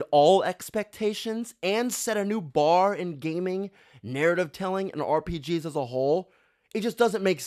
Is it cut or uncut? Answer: uncut